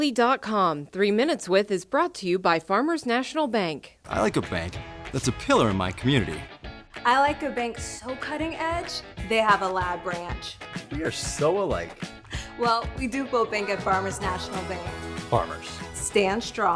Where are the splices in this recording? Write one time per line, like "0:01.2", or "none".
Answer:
none